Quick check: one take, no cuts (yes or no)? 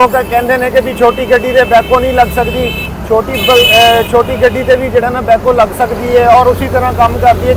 yes